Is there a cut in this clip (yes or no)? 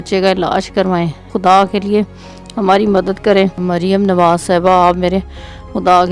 no